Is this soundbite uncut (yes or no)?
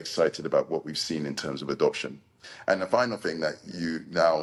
yes